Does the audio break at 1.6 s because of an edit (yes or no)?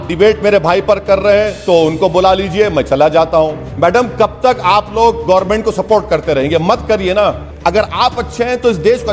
no